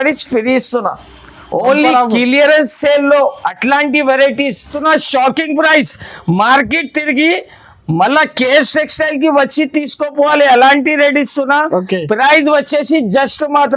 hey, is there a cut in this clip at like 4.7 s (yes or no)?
yes